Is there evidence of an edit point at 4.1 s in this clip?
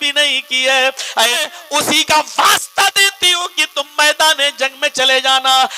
no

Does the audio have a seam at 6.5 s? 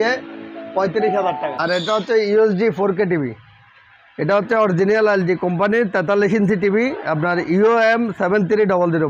no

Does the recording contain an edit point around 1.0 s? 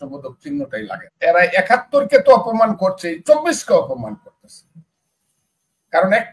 yes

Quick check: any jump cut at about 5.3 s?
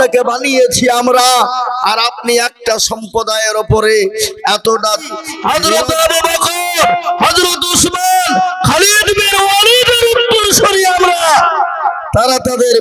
yes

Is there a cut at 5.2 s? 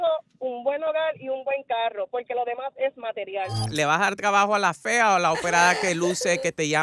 no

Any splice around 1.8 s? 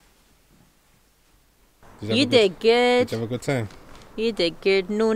yes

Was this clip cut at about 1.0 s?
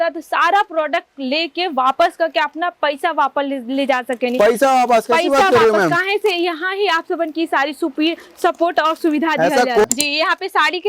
no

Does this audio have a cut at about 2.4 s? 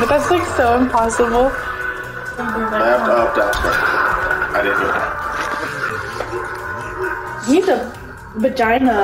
yes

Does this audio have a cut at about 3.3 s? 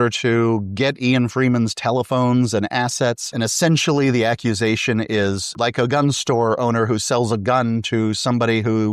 yes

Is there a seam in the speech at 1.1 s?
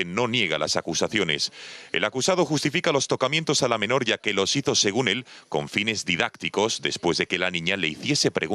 yes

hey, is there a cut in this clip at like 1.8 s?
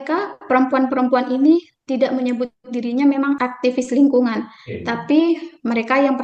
no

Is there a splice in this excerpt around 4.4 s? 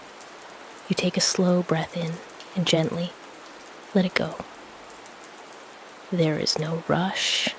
yes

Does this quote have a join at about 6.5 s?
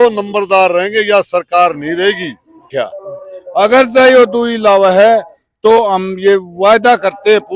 no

